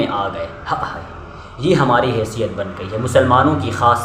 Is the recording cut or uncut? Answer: uncut